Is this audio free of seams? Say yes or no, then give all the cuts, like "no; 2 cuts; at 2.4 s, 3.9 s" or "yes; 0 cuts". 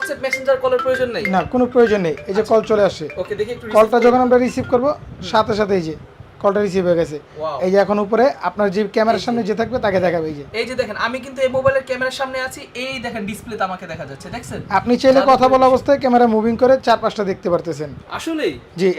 yes; 0 cuts